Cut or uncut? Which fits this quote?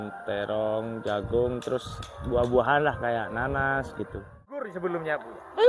cut